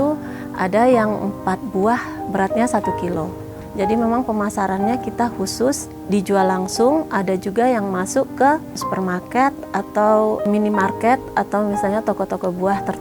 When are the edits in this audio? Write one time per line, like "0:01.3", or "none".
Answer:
0:03.6
0:05.9
0:08.8